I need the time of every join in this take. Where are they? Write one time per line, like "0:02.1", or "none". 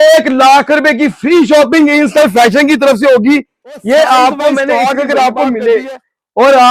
0:04.7

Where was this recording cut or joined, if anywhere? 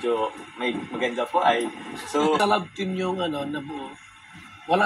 0:02.4

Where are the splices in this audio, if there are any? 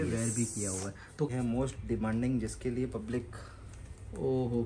0:01.3

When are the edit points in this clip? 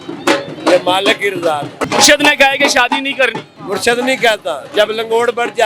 0:01.8
0:03.5

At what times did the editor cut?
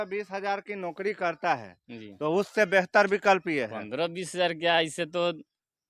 none

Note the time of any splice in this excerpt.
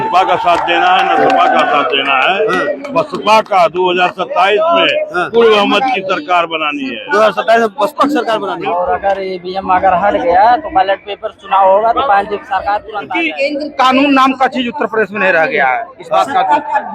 0:08.5
0:12.9

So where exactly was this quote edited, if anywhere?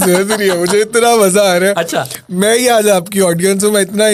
none

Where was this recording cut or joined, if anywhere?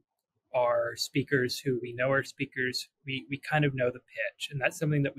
none

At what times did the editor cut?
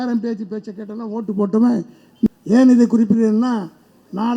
0:02.3

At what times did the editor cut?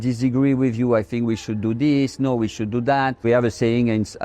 0:03.2

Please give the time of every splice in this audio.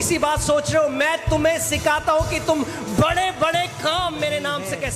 none

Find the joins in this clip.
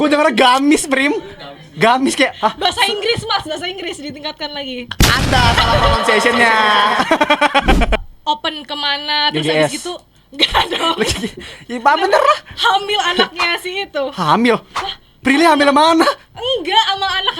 0:08.0

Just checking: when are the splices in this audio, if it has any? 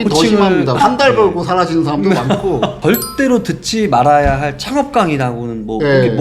0:02.8

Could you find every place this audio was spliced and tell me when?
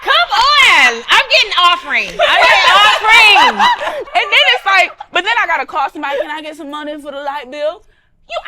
0:03.9

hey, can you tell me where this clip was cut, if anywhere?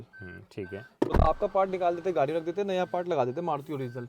0:01.1

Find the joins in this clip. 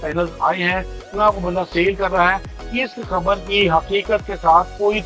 none

